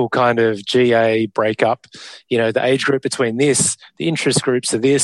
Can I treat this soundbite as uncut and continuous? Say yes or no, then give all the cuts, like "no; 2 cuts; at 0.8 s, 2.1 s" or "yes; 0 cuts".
yes; 0 cuts